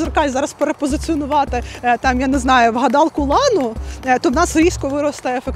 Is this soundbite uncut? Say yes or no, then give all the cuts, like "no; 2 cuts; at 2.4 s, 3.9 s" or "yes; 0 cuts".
yes; 0 cuts